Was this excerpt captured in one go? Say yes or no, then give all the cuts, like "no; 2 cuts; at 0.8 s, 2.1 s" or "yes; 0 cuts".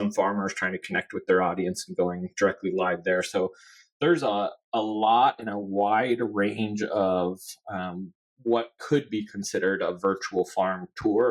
yes; 0 cuts